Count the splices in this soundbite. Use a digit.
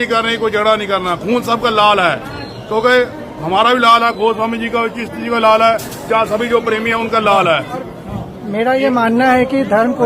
1